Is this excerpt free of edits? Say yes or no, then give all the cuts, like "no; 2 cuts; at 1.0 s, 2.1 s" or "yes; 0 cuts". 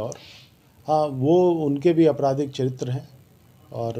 yes; 0 cuts